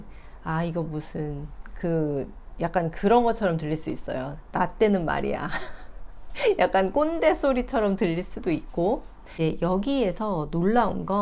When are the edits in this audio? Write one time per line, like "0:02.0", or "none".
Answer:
0:09.3